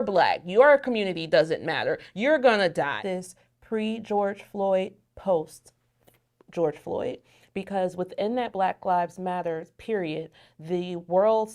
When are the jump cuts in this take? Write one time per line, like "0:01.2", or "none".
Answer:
0:03.0